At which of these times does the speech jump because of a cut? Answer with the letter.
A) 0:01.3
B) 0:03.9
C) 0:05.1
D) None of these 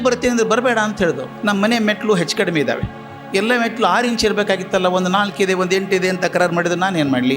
A